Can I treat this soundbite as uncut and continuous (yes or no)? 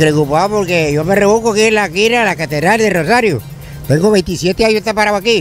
yes